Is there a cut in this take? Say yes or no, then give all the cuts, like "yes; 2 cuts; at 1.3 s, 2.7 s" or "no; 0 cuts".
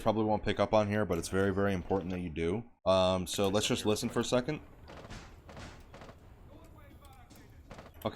yes; 1 cut; at 2.7 s